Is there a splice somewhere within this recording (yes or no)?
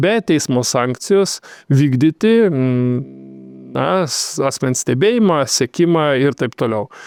no